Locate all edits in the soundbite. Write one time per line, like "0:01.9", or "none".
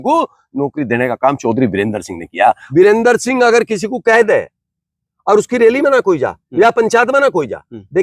0:02.6